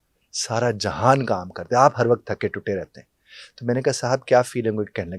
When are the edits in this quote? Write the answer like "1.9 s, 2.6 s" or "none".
none